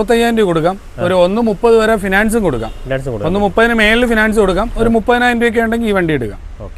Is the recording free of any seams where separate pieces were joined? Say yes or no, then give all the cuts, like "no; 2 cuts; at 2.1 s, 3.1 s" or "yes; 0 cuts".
yes; 0 cuts